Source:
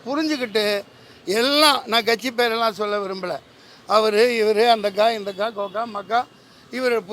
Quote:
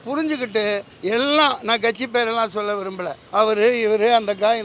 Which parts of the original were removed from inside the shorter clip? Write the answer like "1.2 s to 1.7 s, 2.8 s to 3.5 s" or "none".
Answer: 0.9 s to 1.1 s, 3.4 s to 3.7 s